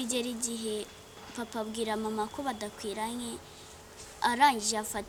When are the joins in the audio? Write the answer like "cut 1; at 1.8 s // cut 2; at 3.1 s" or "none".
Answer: none